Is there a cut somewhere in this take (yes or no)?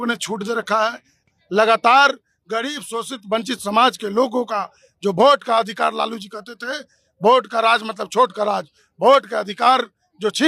yes